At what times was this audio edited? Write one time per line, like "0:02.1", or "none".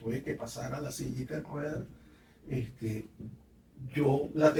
none